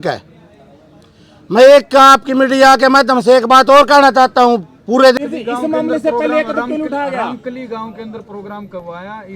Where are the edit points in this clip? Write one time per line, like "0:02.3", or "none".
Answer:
0:05.1

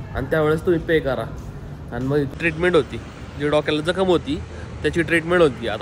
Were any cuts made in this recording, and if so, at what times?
0:02.3

